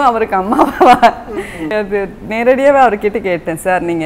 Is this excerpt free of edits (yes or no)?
yes